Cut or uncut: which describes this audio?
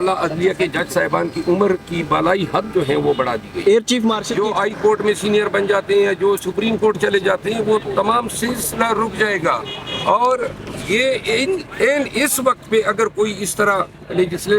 cut